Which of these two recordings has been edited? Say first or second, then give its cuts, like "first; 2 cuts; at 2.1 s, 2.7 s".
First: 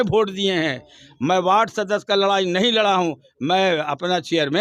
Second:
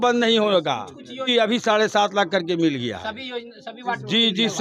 second; 1 cut; at 1.3 s